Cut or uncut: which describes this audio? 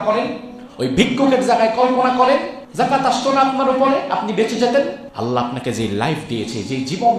cut